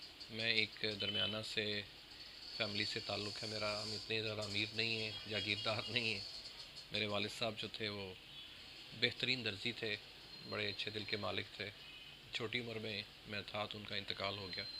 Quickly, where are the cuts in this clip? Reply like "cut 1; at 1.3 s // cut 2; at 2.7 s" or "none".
none